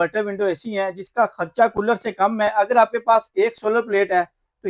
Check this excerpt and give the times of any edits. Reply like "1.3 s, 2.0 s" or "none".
none